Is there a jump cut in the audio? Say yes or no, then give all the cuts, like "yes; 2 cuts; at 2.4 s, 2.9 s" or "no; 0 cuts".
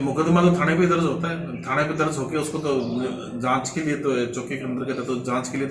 no; 0 cuts